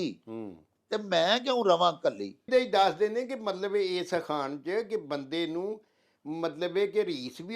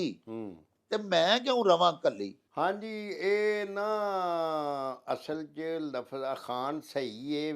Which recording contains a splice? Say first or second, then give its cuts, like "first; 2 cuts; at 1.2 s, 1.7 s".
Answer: first; 1 cut; at 2.5 s